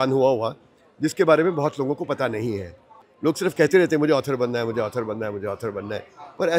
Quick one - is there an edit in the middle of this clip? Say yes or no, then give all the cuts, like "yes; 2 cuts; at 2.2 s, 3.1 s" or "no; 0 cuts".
no; 0 cuts